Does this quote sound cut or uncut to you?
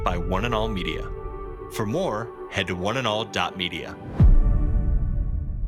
uncut